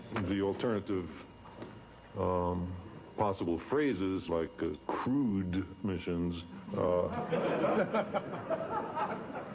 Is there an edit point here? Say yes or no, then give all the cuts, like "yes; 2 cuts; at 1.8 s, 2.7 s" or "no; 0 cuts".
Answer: no; 0 cuts